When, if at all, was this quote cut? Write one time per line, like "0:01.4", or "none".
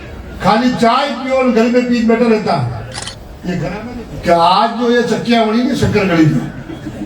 0:03.9